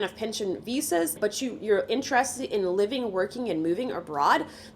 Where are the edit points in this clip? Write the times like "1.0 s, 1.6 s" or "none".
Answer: 1.2 s